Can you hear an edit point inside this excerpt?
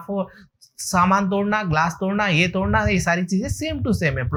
no; 0 cuts

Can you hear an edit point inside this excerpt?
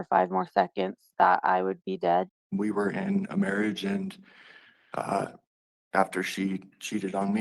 yes; 1 cut; at 2.4 s

